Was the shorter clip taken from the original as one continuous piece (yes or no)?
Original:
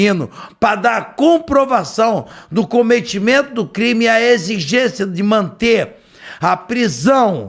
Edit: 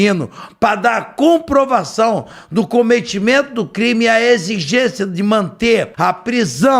no